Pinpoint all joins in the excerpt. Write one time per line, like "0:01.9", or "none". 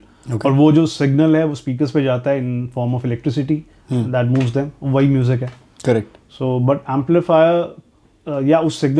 none